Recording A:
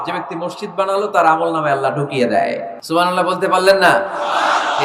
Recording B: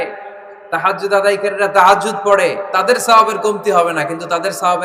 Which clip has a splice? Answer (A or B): A